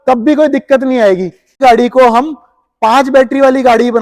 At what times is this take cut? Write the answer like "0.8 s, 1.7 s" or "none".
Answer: 1.5 s